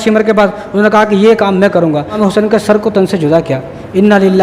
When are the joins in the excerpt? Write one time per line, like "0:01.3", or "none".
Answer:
0:02.2

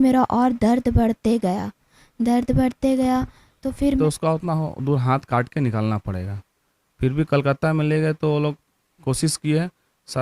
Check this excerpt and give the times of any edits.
0:04.0

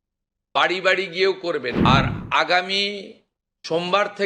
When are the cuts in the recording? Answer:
0:01.8

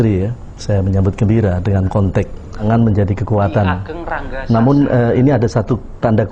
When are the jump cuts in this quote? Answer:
0:02.6

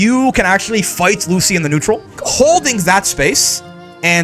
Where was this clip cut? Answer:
0:02.2

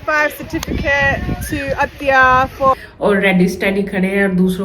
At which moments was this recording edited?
0:02.8

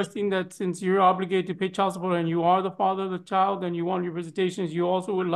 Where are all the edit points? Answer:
none

